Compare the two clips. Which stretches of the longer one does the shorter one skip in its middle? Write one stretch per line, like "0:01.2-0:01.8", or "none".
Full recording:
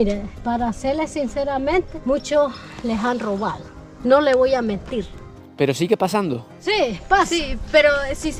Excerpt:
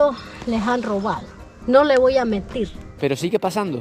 0:05.2-0:05.4